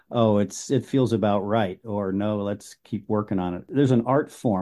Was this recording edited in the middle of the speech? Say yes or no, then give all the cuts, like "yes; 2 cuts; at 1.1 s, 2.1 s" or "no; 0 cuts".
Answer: yes; 1 cut; at 3.7 s